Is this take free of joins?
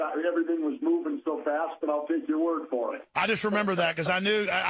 yes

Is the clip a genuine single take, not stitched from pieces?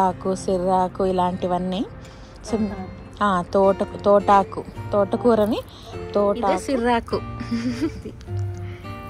no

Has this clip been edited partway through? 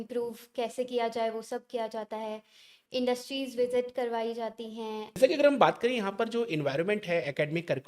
yes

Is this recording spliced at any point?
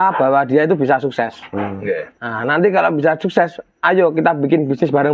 no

